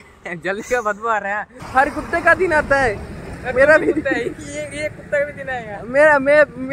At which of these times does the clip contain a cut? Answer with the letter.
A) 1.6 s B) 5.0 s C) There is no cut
A